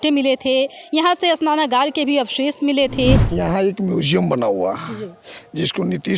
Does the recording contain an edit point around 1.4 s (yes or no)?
no